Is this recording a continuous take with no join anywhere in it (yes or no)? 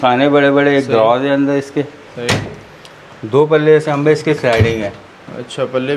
yes